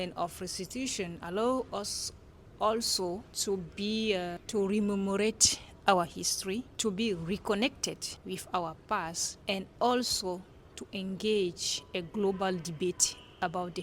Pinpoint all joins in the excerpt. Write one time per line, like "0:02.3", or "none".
0:03.3
0:04.4
0:06.7
0:08.1
0:09.3